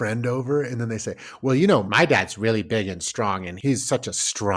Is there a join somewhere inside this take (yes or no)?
yes